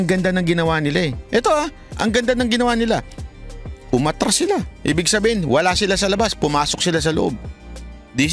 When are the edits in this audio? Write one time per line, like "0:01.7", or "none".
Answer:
none